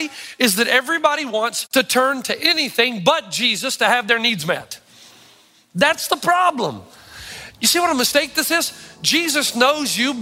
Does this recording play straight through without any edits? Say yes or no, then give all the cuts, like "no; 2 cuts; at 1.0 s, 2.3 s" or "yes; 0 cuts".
no; 1 cut; at 1.6 s